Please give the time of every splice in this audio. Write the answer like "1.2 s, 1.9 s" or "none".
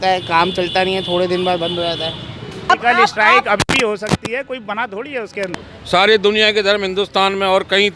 2.7 s, 5.5 s